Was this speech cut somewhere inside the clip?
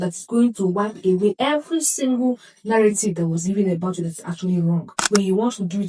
yes; 1 cut; at 4.8 s

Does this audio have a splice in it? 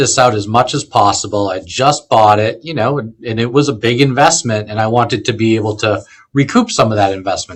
no; 0 cuts

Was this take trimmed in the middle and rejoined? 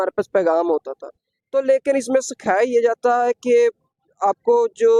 no; 0 cuts

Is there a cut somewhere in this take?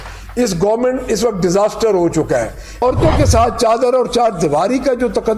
yes; 1 cut; at 2.8 s

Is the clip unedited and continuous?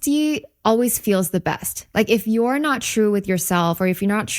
yes; 0 cuts

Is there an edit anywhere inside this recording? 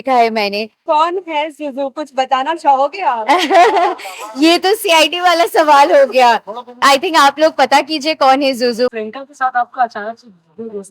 yes; 3 cuts; at 0.8 s, 6.7 s, 8.9 s

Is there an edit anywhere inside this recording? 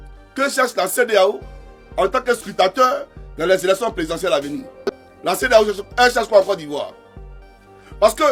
no; 0 cuts

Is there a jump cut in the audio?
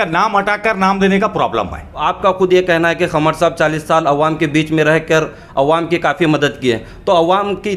yes; 1 cut; at 2.0 s

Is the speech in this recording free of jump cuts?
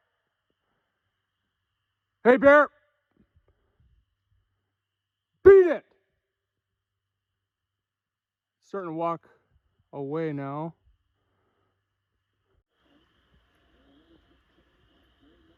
yes; 0 cuts

